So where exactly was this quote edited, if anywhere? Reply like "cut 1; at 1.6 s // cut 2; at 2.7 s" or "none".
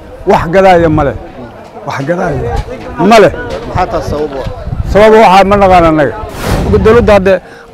cut 1; at 6.7 s